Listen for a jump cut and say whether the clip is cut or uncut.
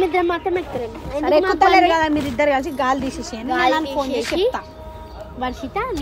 uncut